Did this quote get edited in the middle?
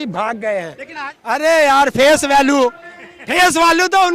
yes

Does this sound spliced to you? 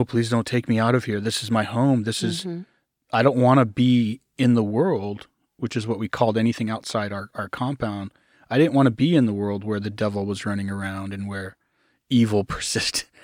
no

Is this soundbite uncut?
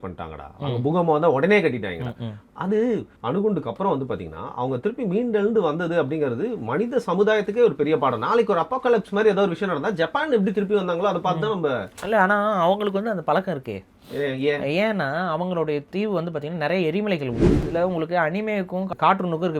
no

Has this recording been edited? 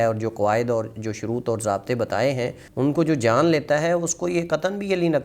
yes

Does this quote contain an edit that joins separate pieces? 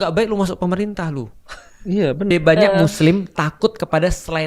yes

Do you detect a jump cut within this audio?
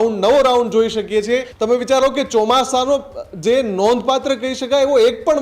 yes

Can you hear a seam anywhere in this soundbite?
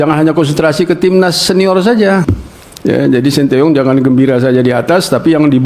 yes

